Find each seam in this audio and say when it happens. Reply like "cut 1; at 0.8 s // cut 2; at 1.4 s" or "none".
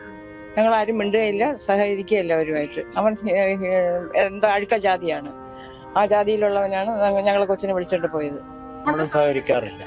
cut 1; at 8.7 s